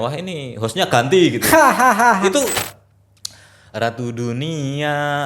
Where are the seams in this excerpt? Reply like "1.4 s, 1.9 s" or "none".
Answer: 2.6 s